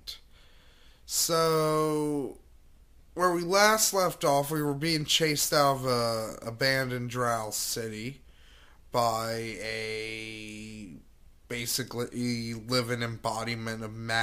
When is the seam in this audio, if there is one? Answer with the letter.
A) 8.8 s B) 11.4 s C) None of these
B